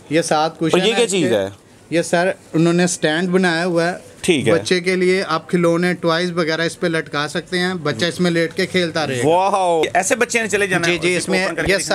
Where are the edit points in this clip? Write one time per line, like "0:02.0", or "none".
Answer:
0:09.8